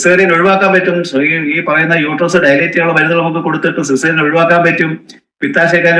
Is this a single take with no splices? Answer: yes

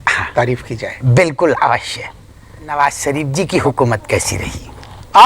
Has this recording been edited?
yes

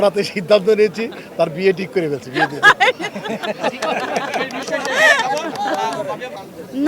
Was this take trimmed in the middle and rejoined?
no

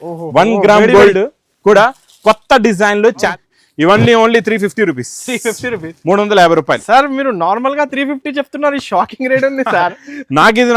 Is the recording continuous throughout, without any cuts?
no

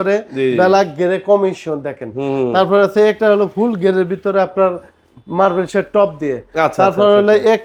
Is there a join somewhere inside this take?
no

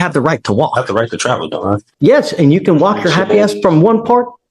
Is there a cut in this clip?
yes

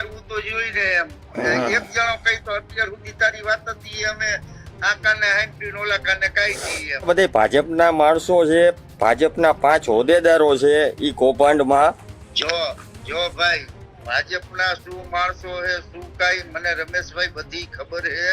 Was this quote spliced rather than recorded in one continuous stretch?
yes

